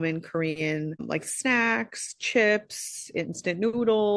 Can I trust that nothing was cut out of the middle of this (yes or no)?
yes